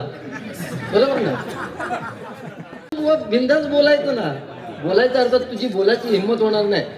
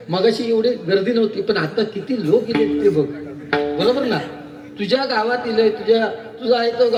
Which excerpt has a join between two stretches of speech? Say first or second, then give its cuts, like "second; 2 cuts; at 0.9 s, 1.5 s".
first; 1 cut; at 2.9 s